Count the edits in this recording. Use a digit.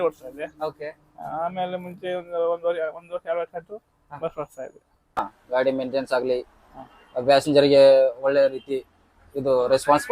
1